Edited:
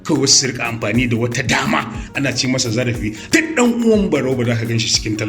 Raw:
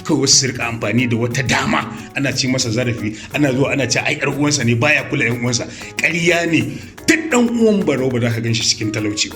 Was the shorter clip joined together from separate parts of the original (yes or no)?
yes